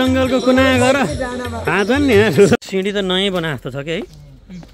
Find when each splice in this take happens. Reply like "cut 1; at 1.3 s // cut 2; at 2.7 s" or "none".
cut 1; at 2.6 s